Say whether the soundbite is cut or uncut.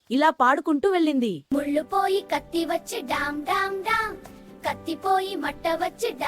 cut